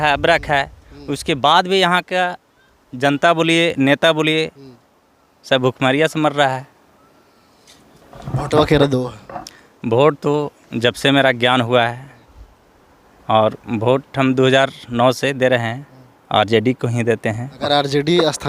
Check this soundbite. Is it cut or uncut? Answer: uncut